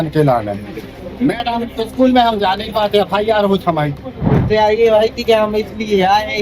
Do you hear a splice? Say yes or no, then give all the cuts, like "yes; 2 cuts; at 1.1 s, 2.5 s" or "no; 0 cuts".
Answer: yes; 1 cut; at 4.4 s